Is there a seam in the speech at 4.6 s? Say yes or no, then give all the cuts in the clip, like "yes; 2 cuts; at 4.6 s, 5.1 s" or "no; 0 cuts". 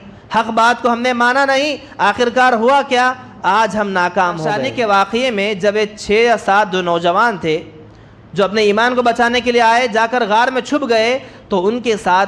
yes; 1 cut; at 4.6 s